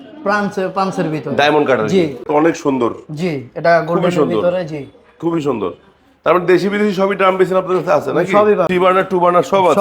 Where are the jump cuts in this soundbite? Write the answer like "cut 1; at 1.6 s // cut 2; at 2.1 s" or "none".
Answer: cut 1; at 2.3 s // cut 2; at 8.7 s